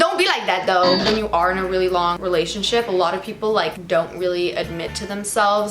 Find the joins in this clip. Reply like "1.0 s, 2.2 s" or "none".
1.0 s, 2.2 s, 3.8 s